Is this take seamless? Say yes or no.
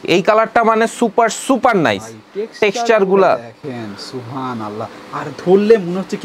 yes